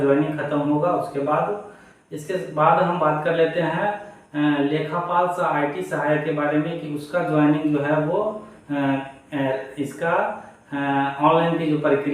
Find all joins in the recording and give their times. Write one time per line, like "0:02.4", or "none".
none